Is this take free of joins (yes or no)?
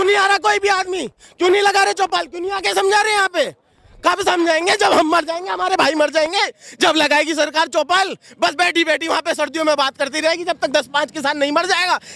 yes